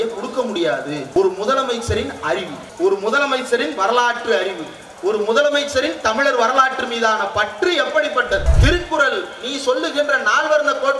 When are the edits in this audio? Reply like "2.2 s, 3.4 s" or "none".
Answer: 1.2 s, 2.6 s, 8.5 s

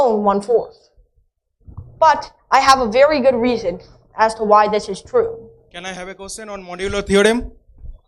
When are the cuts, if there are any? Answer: 5.6 s

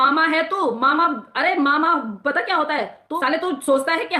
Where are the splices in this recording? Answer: 3.0 s

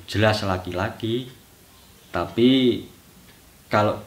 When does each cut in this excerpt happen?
none

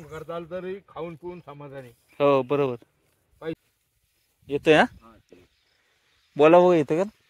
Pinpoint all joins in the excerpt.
3.6 s

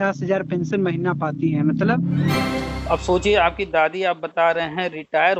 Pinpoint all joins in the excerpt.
2.4 s

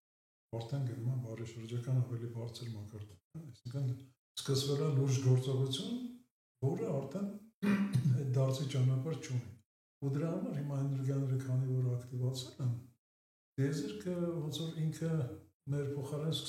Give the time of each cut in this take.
none

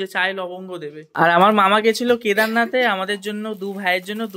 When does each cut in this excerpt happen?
1.0 s

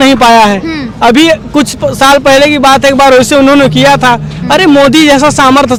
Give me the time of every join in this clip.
none

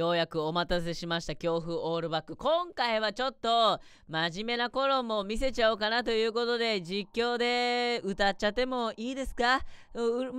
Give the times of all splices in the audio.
none

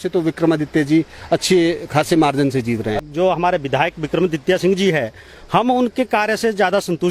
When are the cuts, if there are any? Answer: 3.0 s

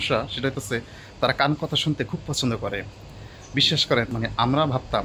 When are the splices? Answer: 4.1 s

